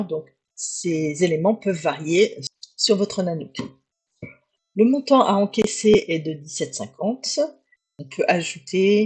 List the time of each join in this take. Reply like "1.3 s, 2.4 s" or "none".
2.4 s, 7.9 s